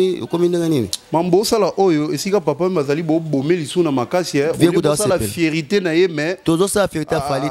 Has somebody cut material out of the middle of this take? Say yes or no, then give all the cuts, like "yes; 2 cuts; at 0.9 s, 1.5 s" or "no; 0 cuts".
no; 0 cuts